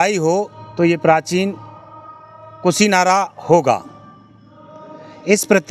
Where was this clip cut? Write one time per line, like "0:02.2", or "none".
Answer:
none